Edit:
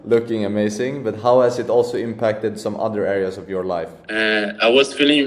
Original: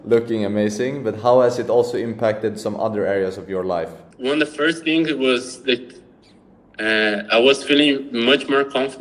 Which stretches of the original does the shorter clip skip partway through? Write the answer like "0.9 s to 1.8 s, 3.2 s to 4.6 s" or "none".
4.0 s to 6.7 s